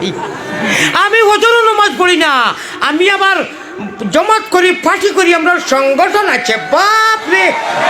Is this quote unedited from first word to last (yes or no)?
yes